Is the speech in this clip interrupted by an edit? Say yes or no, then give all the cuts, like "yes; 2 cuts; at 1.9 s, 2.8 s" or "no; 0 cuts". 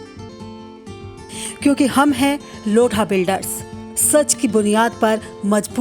no; 0 cuts